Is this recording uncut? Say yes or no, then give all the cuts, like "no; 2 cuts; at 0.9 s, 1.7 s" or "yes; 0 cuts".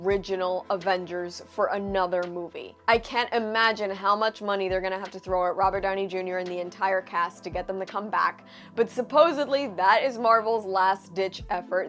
yes; 0 cuts